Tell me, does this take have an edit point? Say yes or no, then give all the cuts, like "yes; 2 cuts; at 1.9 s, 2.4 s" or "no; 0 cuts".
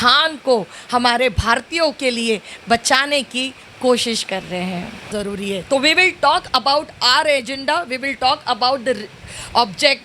yes; 1 cut; at 5.1 s